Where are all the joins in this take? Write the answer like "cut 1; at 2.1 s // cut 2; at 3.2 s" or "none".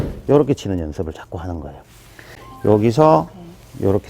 cut 1; at 2.5 s